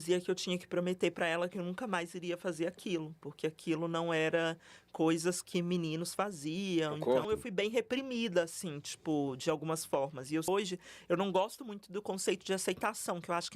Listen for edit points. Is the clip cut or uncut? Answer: cut